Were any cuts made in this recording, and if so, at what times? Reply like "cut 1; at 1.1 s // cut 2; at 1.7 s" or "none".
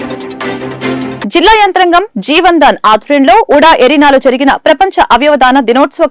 none